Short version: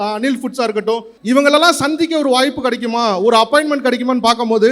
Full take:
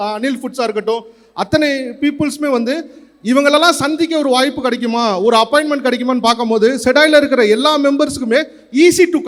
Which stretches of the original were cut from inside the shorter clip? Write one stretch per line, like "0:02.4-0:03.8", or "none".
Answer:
0:01.1-0:03.1